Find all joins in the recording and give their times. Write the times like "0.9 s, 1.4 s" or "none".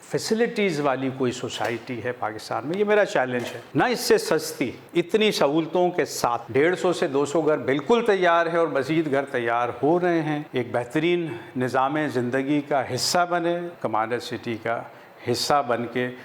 3.6 s, 6.4 s, 10.4 s, 13.7 s